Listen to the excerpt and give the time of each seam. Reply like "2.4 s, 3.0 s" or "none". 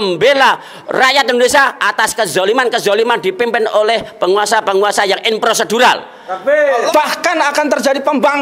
6.9 s